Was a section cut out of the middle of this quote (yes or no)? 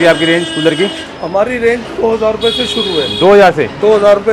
no